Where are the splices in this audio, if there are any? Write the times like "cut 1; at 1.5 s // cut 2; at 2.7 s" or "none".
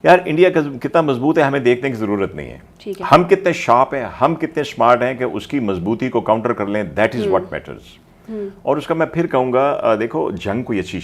none